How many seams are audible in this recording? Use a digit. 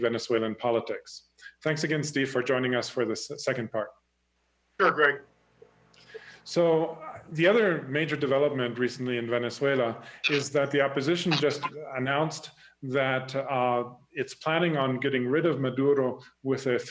1